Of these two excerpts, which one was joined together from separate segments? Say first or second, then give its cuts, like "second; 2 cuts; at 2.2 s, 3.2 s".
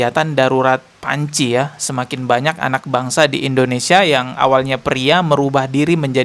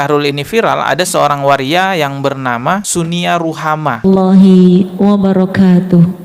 second; 1 cut; at 4.0 s